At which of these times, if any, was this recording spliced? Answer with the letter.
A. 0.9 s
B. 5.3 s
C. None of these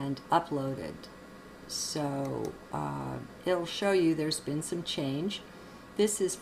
B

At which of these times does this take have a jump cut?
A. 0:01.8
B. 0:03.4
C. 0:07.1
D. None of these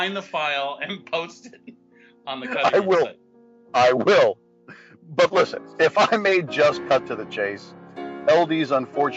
C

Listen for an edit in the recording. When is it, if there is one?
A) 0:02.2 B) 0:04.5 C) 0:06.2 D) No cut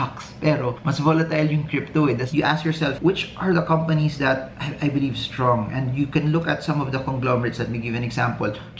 A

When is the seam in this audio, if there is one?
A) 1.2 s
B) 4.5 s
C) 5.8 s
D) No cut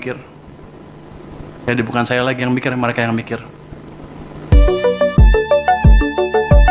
B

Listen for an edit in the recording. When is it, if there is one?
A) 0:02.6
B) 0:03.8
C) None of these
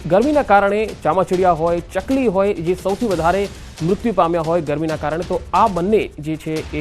A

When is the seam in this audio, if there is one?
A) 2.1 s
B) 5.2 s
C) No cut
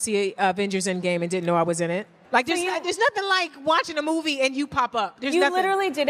A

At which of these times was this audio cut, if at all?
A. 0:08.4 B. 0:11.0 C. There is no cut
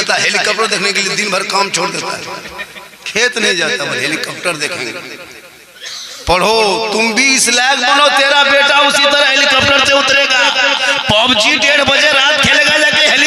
C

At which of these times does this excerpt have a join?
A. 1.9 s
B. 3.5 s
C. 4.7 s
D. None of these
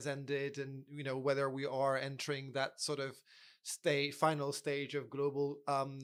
D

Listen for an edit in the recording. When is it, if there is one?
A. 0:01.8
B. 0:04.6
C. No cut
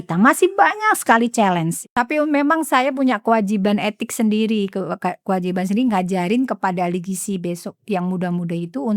A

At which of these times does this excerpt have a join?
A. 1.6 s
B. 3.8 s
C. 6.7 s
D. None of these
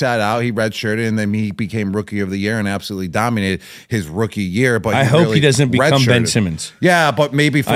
D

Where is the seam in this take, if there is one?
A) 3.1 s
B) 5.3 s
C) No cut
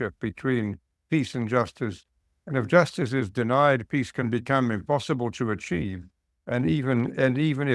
C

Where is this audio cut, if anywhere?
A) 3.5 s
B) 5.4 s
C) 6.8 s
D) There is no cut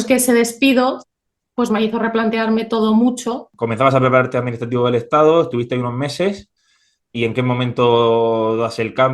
A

